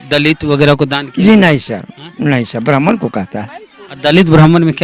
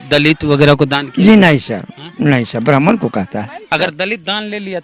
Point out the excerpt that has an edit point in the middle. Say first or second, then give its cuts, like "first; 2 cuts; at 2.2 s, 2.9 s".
second; 1 cut; at 3.6 s